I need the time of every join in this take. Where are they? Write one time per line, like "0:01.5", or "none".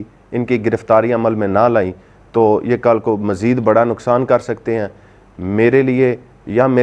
none